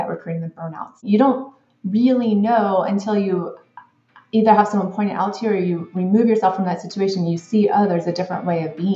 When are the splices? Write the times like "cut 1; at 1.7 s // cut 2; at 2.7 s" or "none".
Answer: cut 1; at 1.0 s